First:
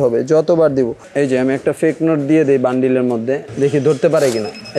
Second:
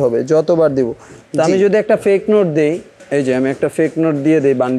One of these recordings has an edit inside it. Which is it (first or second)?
first